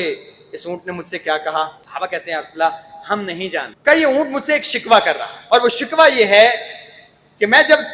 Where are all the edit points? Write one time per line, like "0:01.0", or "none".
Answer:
0:01.8
0:03.7
0:05.3